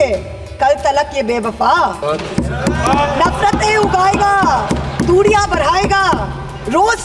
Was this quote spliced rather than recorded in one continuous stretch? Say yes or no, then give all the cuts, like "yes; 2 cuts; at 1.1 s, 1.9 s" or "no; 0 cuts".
yes; 1 cut; at 2.0 s